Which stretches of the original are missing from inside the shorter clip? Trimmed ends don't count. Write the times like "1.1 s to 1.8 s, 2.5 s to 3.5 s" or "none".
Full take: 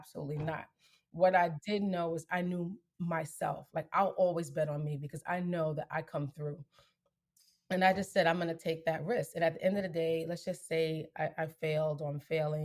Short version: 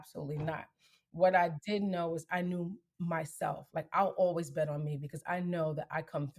none